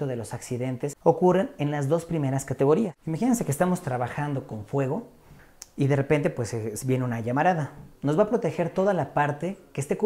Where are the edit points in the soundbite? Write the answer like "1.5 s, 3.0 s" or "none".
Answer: 1.0 s, 3.0 s